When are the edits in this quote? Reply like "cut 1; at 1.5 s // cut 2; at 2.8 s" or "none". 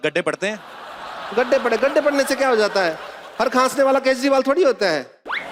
none